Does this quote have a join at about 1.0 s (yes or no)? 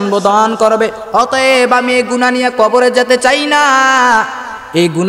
yes